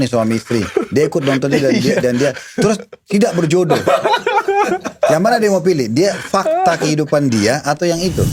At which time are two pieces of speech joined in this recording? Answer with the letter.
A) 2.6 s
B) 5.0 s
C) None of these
C